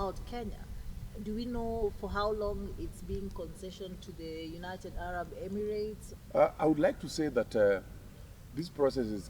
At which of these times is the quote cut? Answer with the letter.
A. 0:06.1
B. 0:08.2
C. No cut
A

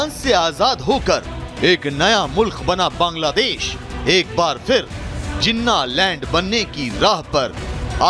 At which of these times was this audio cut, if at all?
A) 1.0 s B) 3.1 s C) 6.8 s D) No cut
D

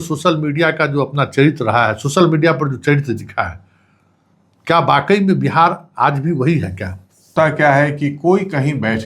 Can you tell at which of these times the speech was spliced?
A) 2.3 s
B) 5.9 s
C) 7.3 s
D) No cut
C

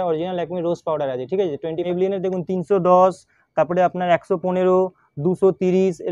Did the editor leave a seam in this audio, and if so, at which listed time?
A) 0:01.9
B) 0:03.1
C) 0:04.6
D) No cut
A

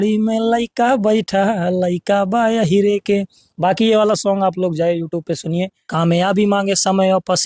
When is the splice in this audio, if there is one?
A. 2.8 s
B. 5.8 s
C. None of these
B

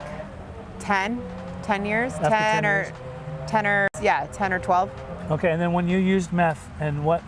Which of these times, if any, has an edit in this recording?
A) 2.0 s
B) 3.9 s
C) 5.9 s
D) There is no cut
B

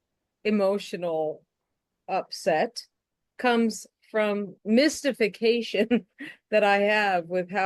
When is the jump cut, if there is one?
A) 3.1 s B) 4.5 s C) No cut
B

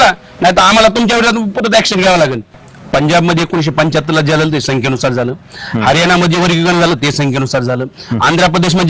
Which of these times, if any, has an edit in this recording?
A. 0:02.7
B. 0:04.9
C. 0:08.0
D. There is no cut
A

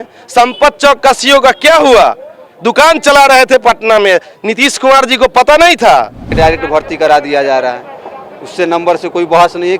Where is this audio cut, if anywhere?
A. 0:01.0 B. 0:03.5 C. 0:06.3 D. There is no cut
C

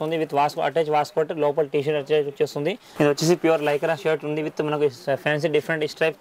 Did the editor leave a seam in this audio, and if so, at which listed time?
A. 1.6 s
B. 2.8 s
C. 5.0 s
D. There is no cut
B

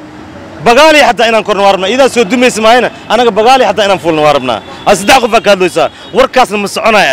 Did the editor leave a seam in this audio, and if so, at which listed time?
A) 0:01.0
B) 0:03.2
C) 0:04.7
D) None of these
D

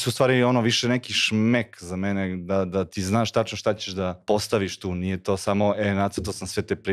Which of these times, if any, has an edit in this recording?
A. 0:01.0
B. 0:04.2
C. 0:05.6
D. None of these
B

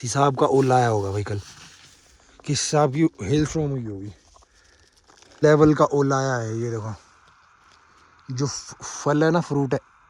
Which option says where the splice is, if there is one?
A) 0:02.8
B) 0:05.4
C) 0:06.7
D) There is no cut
B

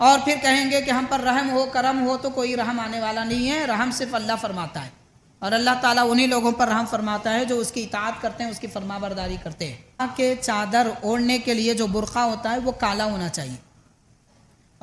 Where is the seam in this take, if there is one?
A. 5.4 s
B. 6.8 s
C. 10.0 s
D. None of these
C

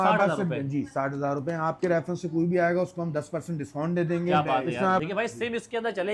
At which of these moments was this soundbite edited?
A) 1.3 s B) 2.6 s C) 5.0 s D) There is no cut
C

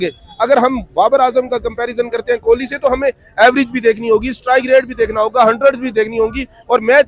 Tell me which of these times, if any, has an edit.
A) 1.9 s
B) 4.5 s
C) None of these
C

